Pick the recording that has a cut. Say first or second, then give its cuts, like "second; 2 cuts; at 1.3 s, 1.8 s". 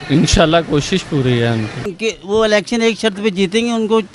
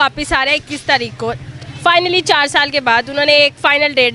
first; 1 cut; at 1.8 s